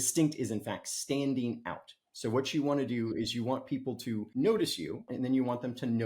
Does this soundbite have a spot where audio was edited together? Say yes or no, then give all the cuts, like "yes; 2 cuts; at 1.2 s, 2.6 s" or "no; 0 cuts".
yes; 2 cuts; at 4.3 s, 5.1 s